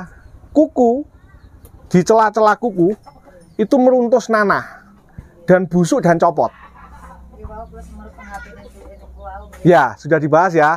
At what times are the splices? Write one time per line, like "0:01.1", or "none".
none